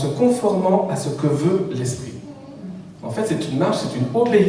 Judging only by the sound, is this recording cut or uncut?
uncut